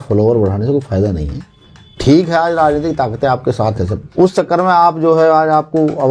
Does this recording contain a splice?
yes; 1 cut; at 3.9 s

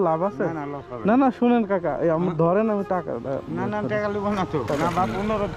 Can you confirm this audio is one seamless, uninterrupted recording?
no; 1 cut; at 4.7 s

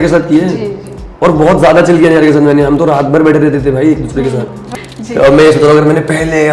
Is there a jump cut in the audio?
yes; 1 cut; at 4.6 s

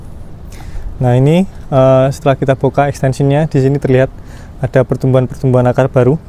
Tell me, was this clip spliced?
no; 0 cuts

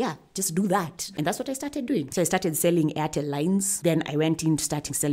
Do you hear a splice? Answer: yes; 3 cuts; at 1.1 s, 2.1 s, 3.7 s

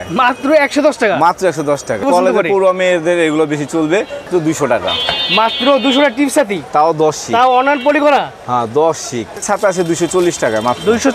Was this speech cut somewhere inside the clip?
yes; 3 cuts; at 2.0 s, 4.3 s, 9.3 s

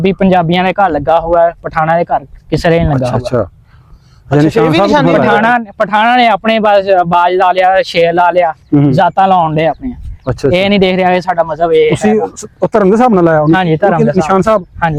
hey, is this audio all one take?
yes; 0 cuts

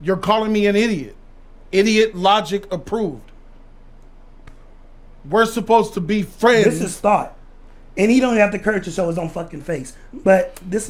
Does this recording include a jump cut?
no; 0 cuts

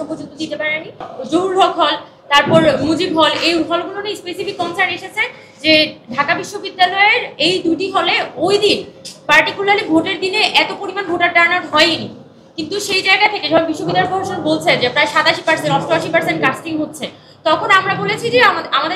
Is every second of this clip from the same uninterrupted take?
no; 1 cut; at 1.1 s

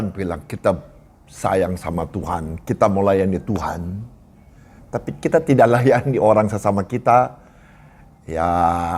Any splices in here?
no; 0 cuts

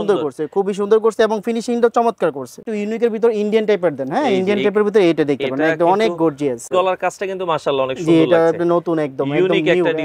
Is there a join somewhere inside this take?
yes; 2 cuts; at 2.6 s, 6.6 s

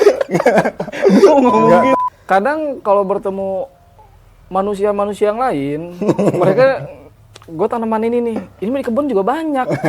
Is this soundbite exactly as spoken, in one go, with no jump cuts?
no; 1 cut; at 1.9 s

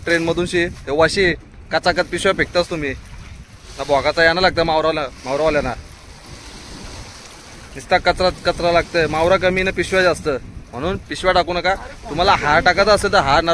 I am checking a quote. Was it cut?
no; 0 cuts

